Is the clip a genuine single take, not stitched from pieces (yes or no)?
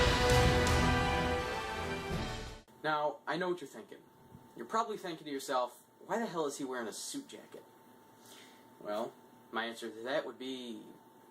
no